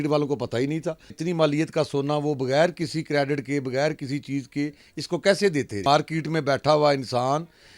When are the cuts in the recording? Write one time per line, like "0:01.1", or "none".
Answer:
0:01.2
0:05.8